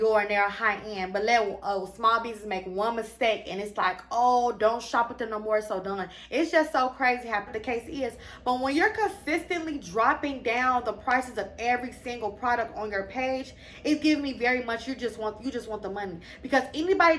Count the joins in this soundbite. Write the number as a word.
one